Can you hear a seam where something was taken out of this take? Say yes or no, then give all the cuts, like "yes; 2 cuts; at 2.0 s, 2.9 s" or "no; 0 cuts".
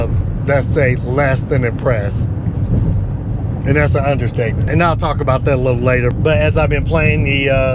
no; 0 cuts